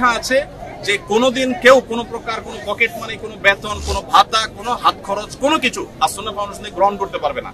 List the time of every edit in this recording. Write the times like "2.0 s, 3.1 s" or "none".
none